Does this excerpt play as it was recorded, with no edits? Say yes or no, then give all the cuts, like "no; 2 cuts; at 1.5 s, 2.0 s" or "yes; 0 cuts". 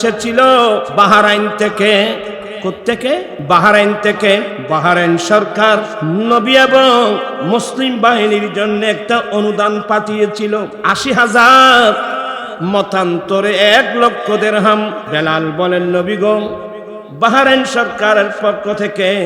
no; 7 cuts; at 0.9 s, 3.3 s, 4.6 s, 5.9 s, 7.3 s, 10.8 s, 15.0 s